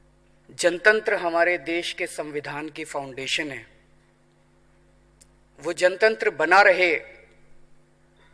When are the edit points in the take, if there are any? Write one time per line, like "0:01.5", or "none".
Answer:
none